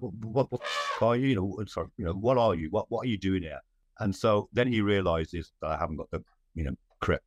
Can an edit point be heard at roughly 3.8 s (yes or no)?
yes